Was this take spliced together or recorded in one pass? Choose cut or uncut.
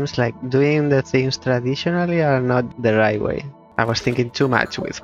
cut